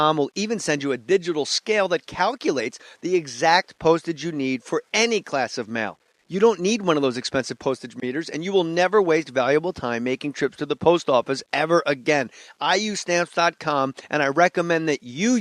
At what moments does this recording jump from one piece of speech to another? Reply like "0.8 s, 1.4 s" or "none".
11.4 s